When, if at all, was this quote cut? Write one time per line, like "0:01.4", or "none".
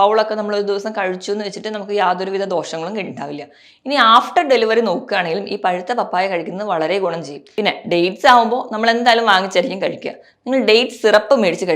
0:07.4